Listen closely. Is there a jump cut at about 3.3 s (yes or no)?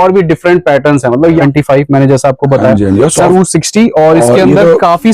yes